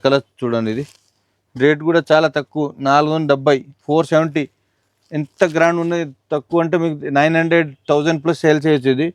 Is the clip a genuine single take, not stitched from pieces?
yes; 0 cuts

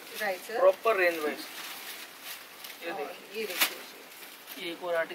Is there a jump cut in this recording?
no; 0 cuts

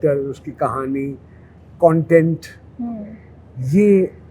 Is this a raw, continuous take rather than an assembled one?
yes; 0 cuts

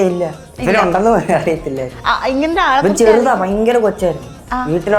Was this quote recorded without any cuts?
yes; 0 cuts

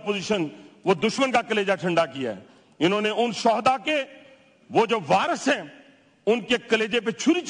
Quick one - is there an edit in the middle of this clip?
no; 0 cuts

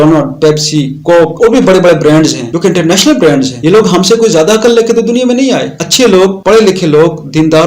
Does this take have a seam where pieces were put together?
yes; 1 cut; at 5.8 s

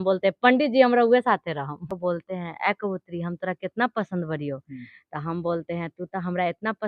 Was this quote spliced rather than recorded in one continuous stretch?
yes; 1 cut; at 1.8 s

